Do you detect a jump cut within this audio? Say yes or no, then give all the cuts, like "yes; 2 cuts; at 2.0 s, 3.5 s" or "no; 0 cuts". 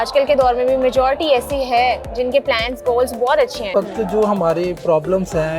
yes; 1 cut; at 3.7 s